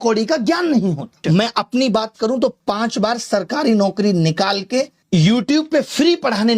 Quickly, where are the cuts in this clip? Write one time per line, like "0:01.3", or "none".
0:05.0